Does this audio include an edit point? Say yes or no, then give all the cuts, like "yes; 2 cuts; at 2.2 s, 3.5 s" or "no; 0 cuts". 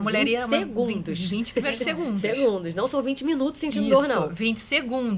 no; 0 cuts